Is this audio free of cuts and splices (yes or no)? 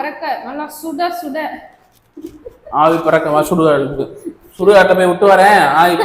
yes